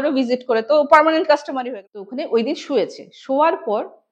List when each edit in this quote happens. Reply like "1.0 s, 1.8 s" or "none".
1.6 s